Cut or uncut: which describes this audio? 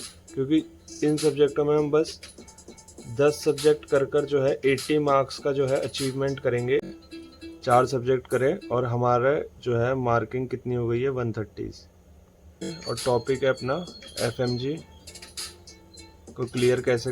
cut